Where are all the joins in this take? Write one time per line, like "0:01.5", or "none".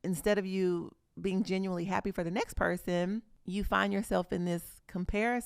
0:03.4